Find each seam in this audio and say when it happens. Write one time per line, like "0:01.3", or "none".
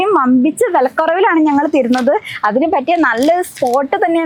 none